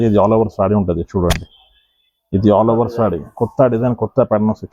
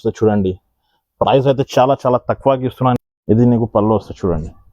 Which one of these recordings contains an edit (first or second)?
second